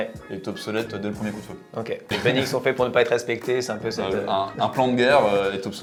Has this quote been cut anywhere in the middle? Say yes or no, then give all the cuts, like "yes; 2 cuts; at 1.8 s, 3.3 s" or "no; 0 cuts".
no; 0 cuts